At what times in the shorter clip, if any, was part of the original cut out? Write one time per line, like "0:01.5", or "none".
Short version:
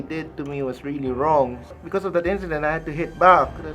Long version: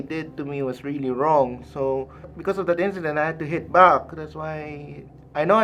0:01.6